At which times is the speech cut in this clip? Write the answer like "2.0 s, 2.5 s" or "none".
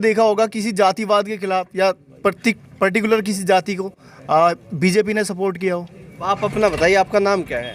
6.2 s